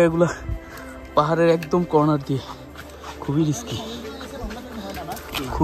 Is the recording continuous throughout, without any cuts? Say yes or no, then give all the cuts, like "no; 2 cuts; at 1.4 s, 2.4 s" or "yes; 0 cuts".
yes; 0 cuts